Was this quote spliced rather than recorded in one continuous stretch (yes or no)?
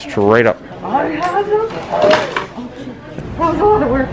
yes